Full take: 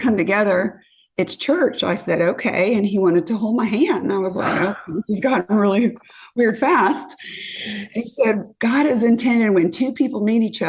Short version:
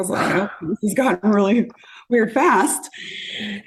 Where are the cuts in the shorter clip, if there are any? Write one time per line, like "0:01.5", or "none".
none